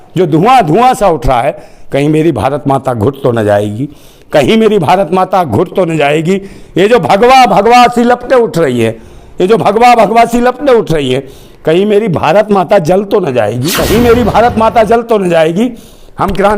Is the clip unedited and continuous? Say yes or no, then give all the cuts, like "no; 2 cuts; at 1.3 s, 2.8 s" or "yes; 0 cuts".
no; 1 cut; at 13.7 s